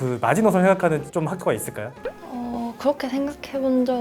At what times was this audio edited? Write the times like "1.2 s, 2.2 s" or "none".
none